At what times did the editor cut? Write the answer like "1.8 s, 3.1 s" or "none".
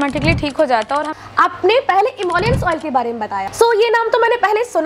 1.1 s, 3.5 s